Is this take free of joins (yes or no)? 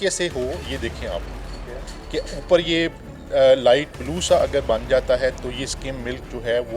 yes